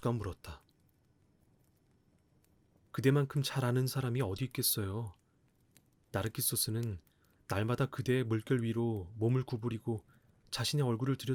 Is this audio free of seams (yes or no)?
yes